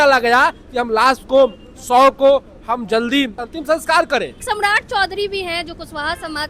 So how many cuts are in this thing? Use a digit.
2